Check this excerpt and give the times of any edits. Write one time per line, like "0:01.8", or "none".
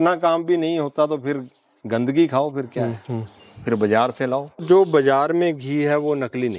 0:04.6